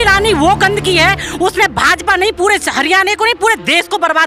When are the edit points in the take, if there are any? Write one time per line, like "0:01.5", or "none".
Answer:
none